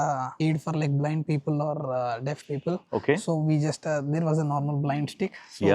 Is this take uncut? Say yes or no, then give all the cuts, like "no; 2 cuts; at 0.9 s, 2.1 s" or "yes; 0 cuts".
yes; 0 cuts